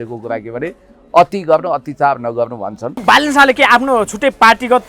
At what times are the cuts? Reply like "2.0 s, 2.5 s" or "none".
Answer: 3.0 s